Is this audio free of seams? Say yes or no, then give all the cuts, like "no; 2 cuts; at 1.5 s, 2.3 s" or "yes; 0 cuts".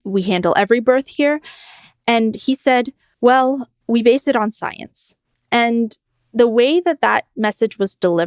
no; 2 cuts; at 3.0 s, 3.7 s